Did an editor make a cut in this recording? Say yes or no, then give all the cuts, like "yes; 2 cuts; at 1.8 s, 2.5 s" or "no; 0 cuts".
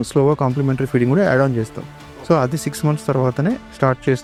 no; 0 cuts